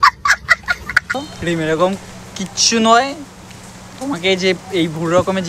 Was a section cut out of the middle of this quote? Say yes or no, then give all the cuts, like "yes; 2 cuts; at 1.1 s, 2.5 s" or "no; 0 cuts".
no; 0 cuts